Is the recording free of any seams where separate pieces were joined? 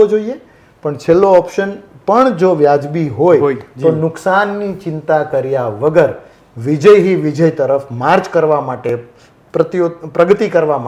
yes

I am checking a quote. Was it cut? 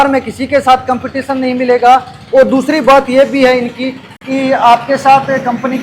no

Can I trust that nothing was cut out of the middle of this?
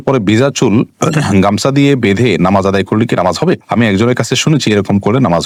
yes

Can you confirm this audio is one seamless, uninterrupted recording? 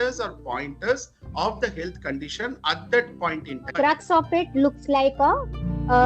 no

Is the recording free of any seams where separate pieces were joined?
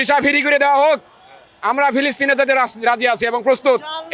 yes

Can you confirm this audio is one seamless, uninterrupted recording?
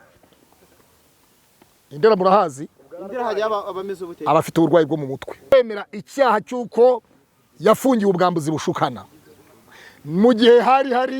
no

